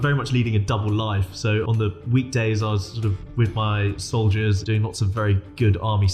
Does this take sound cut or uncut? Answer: cut